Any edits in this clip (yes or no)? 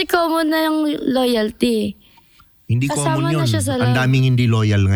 no